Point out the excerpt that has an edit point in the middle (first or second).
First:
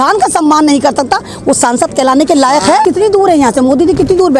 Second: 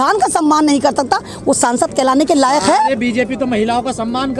first